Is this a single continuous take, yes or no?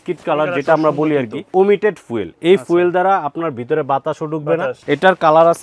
no